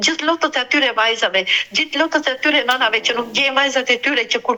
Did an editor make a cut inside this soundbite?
no; 0 cuts

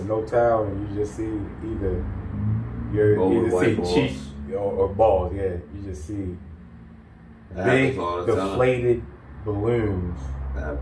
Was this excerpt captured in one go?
yes; 0 cuts

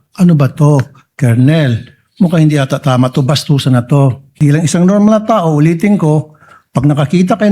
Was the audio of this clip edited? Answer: yes; 1 cut; at 4.3 s

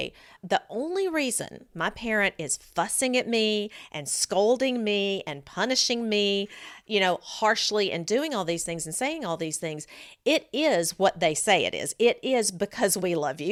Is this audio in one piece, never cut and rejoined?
yes; 0 cuts

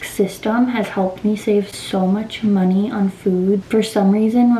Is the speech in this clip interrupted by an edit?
no; 0 cuts

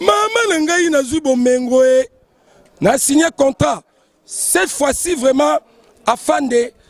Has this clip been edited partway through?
no; 0 cuts

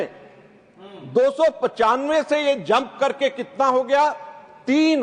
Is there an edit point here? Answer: no; 0 cuts

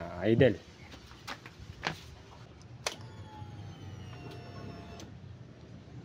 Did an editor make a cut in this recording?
no; 0 cuts

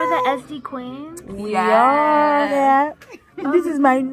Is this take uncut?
no; 1 cut; at 2.5 s

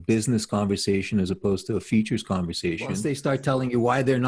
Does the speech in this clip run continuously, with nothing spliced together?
no; 1 cut; at 3.0 s

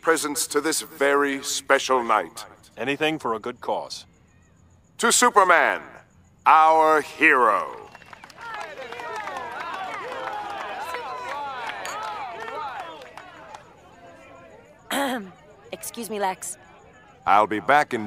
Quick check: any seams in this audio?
yes; 1 cut; at 8.5 s

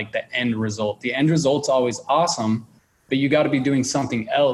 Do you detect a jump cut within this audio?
no; 0 cuts

